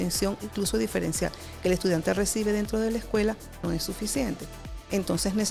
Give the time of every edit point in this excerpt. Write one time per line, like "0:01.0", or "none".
none